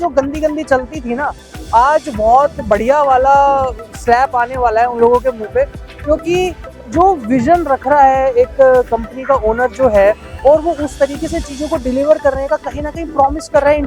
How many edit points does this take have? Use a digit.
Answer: 0